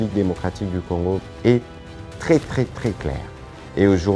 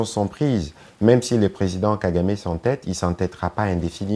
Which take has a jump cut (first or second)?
first